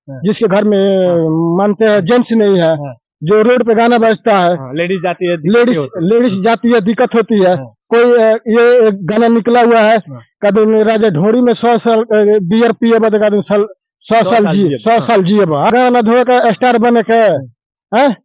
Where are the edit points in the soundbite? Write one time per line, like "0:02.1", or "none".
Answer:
none